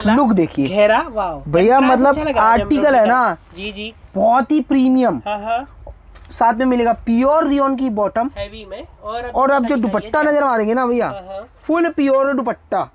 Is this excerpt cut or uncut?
uncut